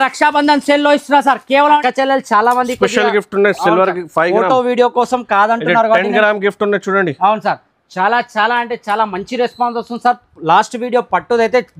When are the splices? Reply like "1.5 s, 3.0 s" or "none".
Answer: 1.8 s